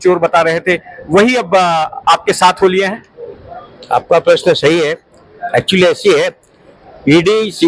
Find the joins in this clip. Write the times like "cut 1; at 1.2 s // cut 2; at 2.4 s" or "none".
none